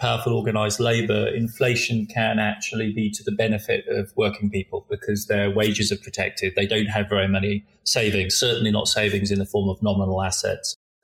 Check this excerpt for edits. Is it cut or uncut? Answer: uncut